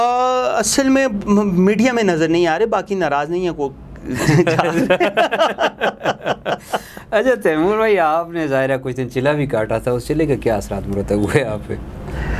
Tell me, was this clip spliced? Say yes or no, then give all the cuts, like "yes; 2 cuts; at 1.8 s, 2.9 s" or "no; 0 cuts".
no; 0 cuts